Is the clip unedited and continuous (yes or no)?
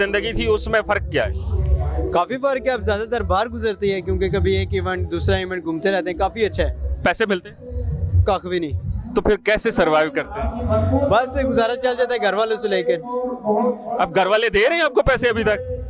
yes